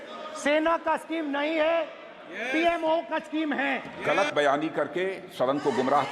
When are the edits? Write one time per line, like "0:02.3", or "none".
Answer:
0:03.9